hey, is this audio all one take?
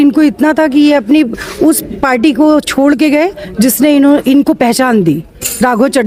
yes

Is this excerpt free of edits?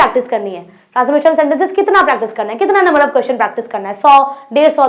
yes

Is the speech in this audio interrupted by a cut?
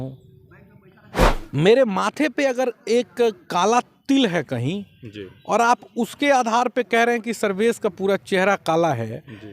yes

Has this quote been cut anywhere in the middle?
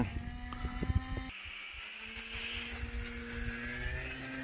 yes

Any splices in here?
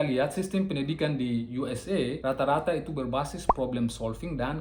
no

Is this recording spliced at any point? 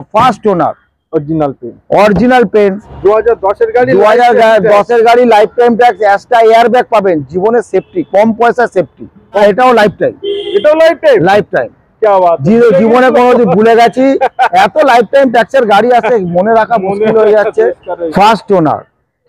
yes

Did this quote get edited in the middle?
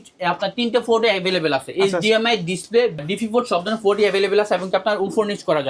no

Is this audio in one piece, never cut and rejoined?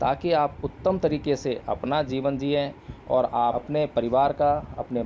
no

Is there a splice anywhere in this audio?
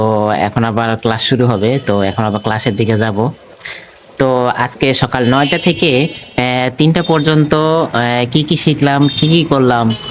no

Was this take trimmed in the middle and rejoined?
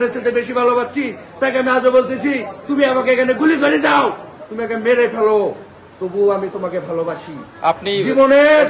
no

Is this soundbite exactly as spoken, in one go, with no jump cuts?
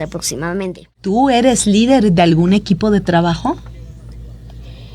no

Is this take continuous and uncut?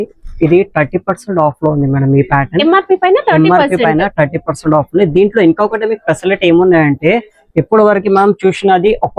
yes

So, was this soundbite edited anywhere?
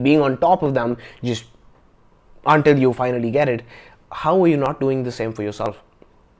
no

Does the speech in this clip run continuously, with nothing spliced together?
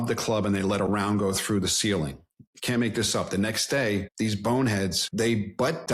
no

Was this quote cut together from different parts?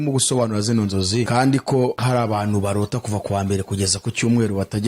yes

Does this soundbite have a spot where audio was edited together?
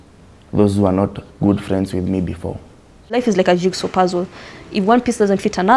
yes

